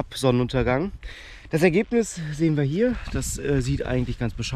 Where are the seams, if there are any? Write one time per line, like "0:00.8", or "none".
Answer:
none